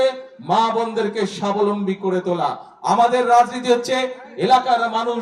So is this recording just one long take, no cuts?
yes; 0 cuts

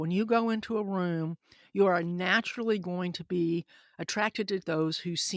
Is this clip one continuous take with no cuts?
yes; 0 cuts

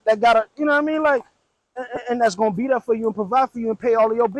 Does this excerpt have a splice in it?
no; 0 cuts

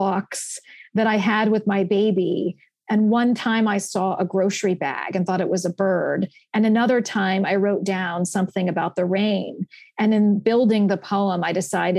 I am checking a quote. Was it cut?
no; 0 cuts

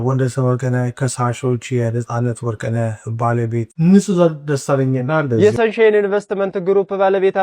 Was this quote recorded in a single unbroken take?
no; 1 cut; at 5.4 s

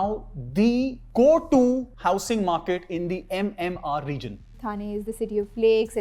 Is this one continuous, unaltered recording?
no; 2 cuts; at 1.9 s, 4.6 s

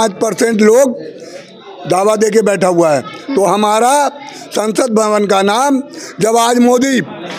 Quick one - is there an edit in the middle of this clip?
no; 0 cuts

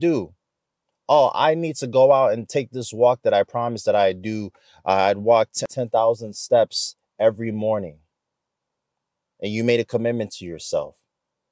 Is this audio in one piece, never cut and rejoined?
no; 1 cut; at 5.7 s

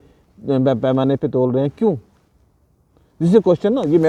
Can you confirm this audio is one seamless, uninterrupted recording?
yes; 0 cuts

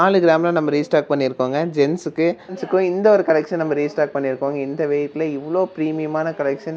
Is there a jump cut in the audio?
yes; 1 cut; at 2.5 s

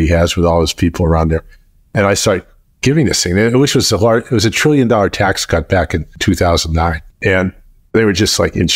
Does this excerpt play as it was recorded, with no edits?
no; 1 cut; at 7.1 s

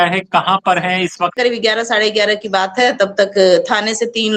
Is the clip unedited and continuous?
no; 1 cut; at 1.4 s

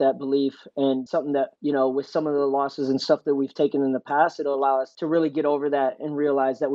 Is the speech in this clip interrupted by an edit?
yes; 2 cuts; at 1.1 s, 4.9 s

